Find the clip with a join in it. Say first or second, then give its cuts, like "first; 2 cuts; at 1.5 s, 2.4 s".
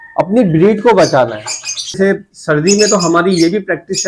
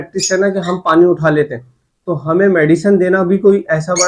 first; 1 cut; at 2.0 s